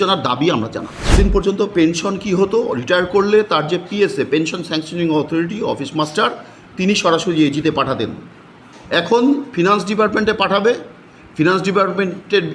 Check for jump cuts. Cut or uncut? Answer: cut